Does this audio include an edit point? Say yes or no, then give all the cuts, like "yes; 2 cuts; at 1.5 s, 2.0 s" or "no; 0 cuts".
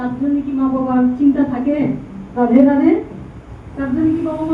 no; 0 cuts